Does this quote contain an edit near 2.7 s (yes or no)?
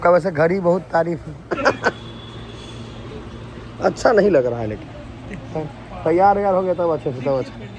no